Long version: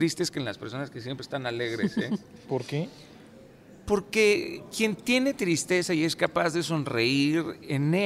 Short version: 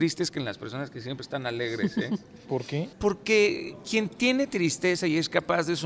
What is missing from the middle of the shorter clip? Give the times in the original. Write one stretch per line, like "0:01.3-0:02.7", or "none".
0:02.9-0:03.8

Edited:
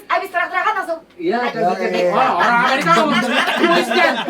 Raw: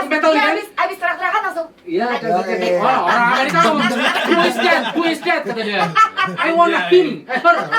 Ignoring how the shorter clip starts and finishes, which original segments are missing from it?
none

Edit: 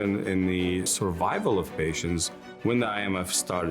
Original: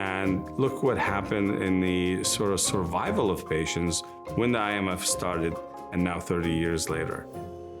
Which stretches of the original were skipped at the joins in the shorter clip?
0:02.3-0:02.6

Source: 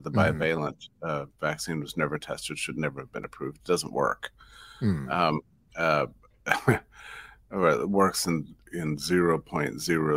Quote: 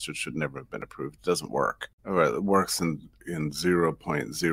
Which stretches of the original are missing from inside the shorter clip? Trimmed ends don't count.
0:04.3-0:07.4

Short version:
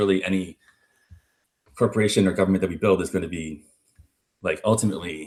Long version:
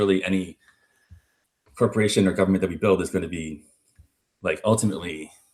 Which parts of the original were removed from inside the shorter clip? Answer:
none

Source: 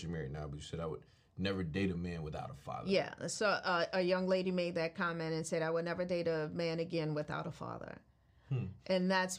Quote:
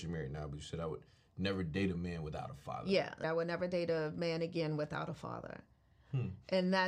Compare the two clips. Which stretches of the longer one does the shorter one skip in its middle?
0:03.2-0:05.6

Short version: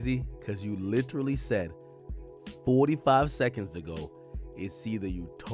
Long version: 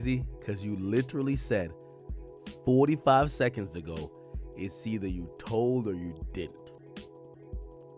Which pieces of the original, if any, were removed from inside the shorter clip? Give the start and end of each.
none

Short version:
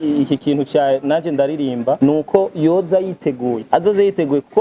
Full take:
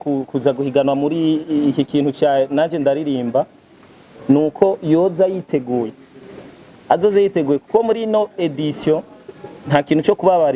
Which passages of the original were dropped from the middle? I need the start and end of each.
0:03.4-0:04.2
0:05.9-0:06.8

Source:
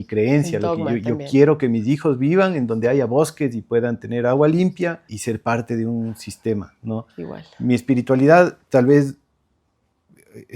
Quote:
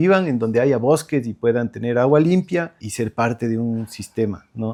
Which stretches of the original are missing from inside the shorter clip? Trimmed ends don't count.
none

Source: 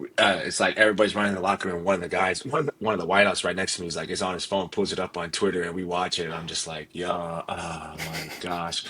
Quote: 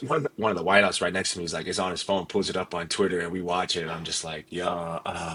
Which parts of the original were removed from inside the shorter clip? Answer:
none

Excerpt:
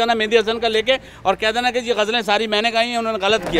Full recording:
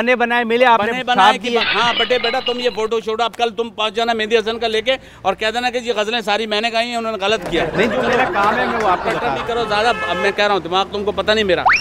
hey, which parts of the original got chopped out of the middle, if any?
none

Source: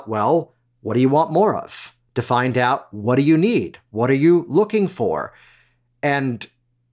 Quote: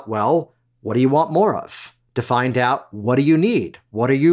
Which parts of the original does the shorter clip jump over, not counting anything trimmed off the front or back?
none

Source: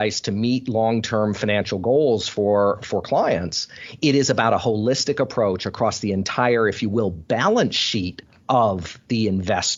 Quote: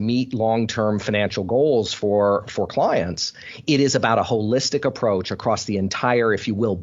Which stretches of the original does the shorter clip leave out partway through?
none

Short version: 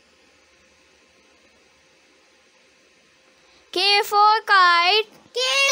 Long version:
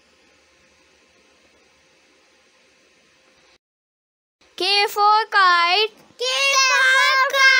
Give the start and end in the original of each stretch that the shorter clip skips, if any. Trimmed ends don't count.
0:03.6-0:04.4

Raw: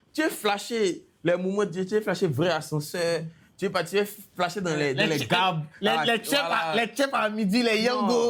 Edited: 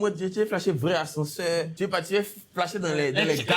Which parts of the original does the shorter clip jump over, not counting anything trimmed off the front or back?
0:03.3-0:03.5

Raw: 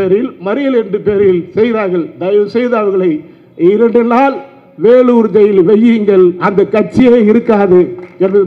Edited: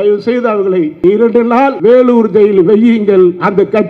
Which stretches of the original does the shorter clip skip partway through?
0:03.2-0:03.5
0:04.4-0:04.8

